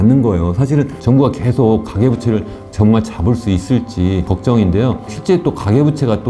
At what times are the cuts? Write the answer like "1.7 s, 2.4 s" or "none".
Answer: 0.9 s, 4.3 s, 5.2 s